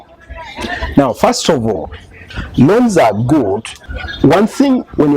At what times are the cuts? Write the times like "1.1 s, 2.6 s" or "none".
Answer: 3.8 s